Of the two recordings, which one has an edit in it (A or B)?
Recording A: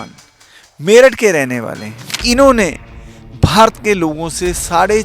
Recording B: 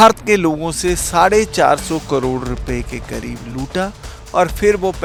A